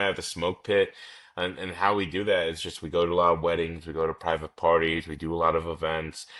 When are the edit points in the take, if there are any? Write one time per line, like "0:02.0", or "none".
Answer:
none

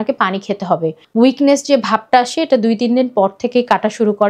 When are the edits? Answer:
0:01.0

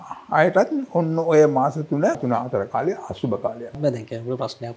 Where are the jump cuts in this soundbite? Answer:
0:02.2
0:03.8

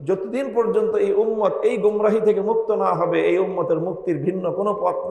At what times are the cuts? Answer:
none

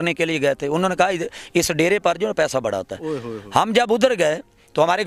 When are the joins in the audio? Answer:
none

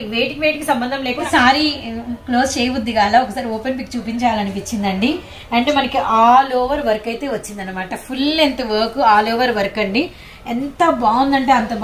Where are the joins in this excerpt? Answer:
0:01.2

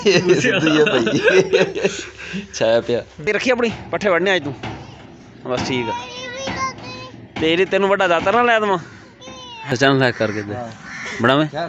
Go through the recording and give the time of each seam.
0:03.1
0:09.7

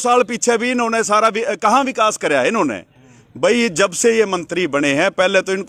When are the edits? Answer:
none

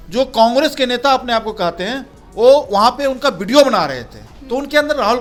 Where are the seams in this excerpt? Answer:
none

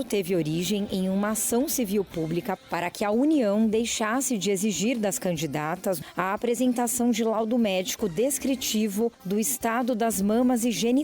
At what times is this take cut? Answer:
0:02.6
0:06.0

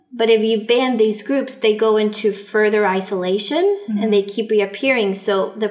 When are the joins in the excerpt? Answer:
none

